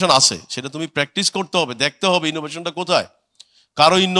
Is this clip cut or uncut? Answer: uncut